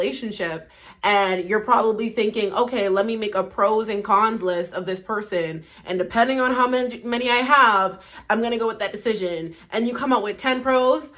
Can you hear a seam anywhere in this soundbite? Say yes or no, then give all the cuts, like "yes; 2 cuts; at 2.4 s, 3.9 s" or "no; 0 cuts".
no; 0 cuts